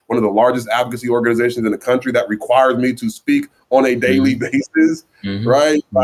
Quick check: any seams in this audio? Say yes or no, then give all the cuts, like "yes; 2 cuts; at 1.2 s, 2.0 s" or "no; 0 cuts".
no; 0 cuts